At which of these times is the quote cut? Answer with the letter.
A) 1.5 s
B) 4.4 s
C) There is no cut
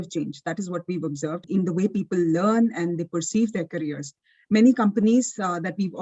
A